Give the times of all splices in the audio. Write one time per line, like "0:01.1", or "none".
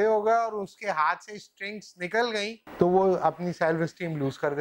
0:02.6